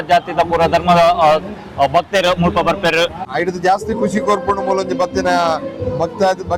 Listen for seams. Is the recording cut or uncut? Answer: cut